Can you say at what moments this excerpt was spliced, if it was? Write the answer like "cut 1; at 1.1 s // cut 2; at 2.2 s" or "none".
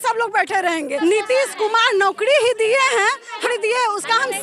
cut 1; at 1.0 s // cut 2; at 3.4 s